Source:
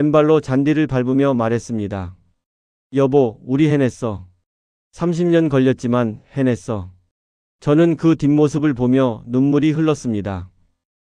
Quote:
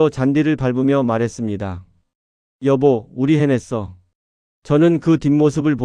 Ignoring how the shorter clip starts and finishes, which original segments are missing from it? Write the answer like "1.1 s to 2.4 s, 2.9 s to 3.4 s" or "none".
5.1 s to 7.8 s